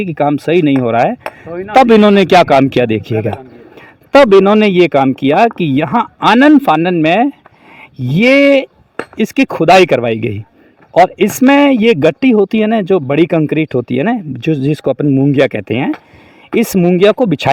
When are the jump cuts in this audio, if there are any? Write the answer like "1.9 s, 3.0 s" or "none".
none